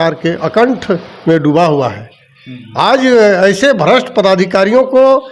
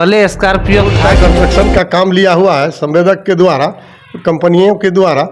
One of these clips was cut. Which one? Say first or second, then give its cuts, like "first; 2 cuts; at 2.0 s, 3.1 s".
second; 1 cut; at 1.0 s